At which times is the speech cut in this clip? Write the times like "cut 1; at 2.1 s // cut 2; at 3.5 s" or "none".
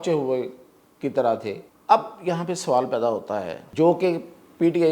cut 1; at 1.7 s // cut 2; at 3.6 s